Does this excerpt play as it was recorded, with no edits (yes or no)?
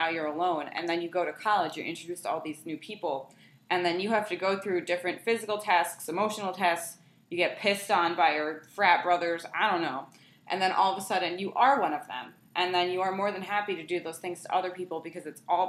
yes